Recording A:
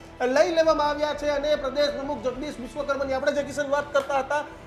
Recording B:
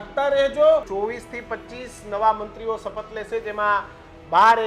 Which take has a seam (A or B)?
B